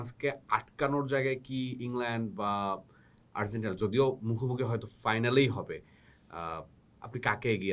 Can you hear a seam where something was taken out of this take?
no; 0 cuts

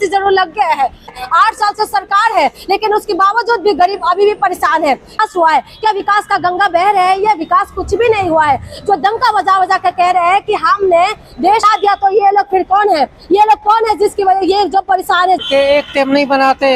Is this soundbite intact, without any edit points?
no; 4 cuts; at 1.2 s, 5.2 s, 11.7 s, 15.4 s

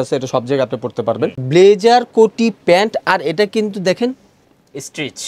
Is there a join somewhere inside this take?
yes; 1 cut; at 1.3 s

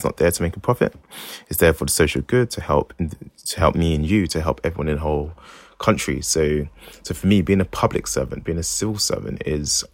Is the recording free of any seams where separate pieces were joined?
yes; 0 cuts

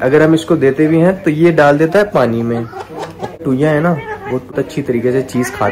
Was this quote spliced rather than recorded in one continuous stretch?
yes; 2 cuts; at 3.4 s, 4.5 s

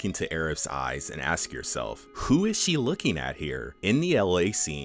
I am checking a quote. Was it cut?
yes; 2 cuts; at 2.1 s, 3.7 s

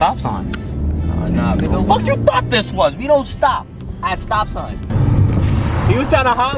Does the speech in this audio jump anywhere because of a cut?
yes; 1 cut; at 4.9 s

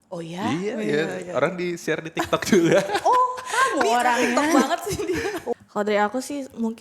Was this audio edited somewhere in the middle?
yes; 1 cut; at 5.5 s

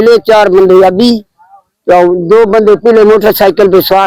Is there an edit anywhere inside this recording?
no; 0 cuts

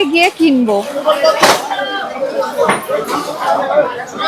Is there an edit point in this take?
yes; 1 cut; at 0.9 s

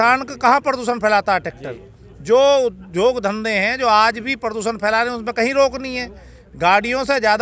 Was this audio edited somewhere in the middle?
no; 0 cuts

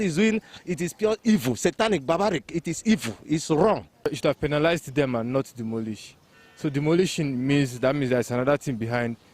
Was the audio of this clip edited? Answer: yes; 1 cut; at 4.1 s

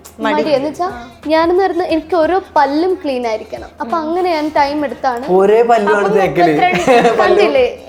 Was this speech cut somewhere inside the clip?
no; 0 cuts

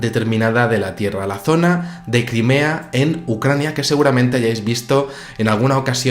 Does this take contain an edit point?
no; 0 cuts

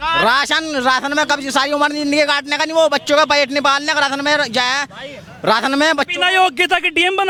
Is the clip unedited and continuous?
yes; 0 cuts

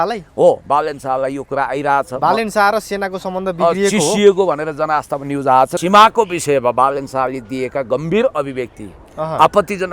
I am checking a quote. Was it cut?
yes; 1 cut; at 5.8 s

